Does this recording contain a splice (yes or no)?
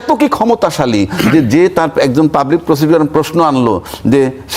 no